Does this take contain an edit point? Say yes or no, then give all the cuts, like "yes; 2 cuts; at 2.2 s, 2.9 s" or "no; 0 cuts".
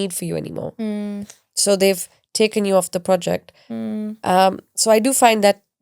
no; 0 cuts